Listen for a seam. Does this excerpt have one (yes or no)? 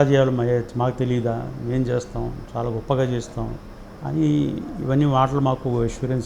no